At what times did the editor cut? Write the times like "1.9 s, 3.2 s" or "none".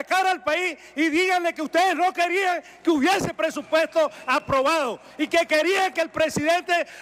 none

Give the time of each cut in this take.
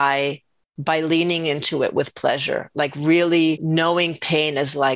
3.6 s

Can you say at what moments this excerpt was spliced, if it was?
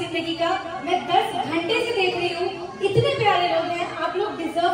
none

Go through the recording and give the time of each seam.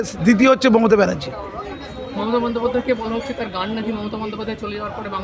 none

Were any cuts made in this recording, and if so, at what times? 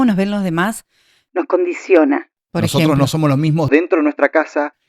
2.4 s

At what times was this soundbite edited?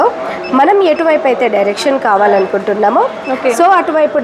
none

